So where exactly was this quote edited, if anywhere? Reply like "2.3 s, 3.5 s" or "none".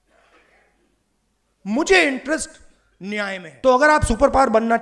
3.2 s